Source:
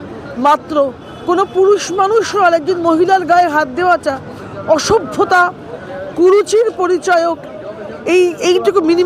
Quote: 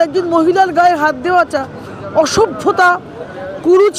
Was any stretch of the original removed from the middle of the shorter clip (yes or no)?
no